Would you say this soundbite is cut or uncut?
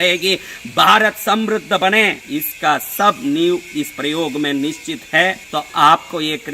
cut